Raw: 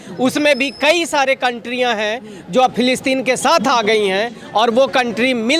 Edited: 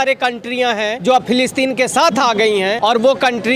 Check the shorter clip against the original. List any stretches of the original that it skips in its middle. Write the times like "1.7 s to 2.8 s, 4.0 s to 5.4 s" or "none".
2.2 s to 2.4 s, 4.2 s to 4.5 s